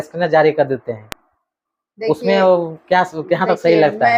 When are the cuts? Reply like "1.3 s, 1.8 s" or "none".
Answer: none